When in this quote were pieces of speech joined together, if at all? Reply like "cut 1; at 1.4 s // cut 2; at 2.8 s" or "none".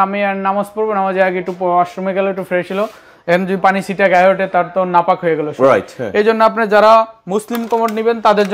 none